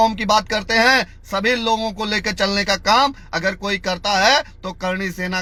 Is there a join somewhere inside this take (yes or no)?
no